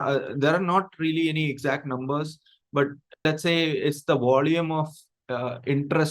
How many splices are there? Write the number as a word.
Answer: one